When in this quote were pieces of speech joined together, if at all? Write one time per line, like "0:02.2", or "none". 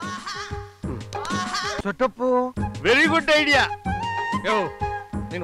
0:01.8